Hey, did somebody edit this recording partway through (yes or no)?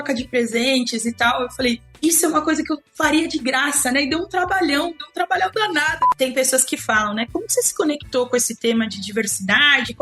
yes